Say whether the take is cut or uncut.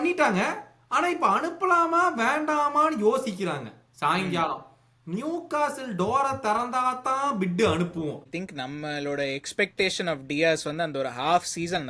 cut